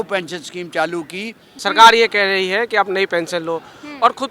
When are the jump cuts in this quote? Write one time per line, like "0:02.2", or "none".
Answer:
0:01.5